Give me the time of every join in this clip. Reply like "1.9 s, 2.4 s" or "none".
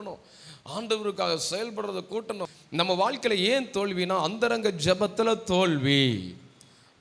2.5 s